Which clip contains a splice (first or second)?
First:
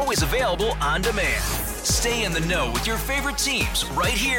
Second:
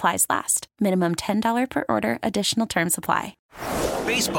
second